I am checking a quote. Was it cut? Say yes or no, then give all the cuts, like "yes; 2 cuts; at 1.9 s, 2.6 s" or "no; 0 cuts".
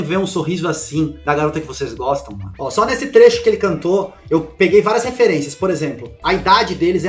no; 0 cuts